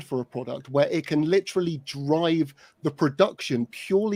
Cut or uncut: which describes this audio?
uncut